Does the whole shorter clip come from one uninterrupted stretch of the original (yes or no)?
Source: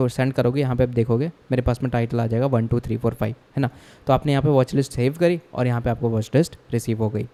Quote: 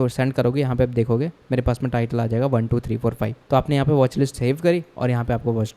no